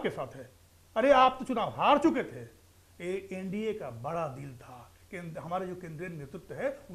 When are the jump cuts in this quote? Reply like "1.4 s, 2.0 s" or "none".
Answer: none